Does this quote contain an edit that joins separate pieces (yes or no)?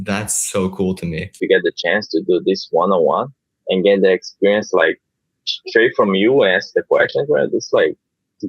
yes